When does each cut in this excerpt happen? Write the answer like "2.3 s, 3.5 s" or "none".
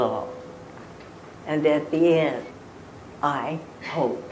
2.6 s